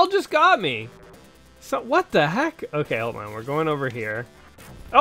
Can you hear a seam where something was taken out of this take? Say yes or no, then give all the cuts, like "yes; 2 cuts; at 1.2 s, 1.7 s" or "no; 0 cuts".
no; 0 cuts